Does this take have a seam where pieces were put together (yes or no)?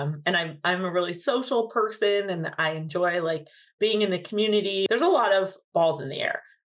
yes